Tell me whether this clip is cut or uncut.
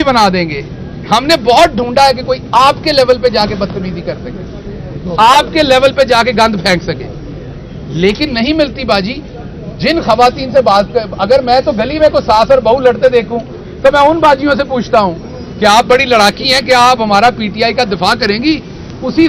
uncut